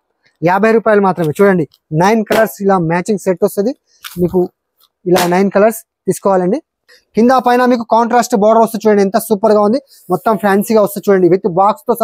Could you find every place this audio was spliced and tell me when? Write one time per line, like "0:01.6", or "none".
0:06.8